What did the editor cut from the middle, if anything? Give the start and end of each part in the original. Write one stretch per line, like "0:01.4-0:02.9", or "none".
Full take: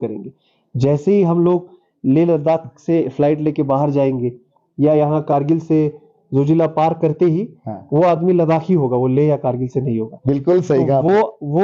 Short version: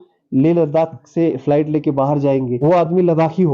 0:04.2-0:07.8